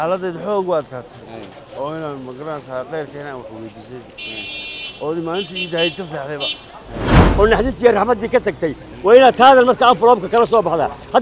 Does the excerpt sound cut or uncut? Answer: cut